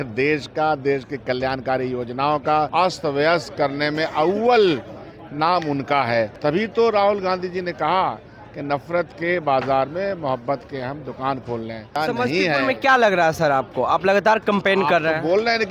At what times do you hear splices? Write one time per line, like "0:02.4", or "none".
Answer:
0:02.7
0:06.3
0:11.9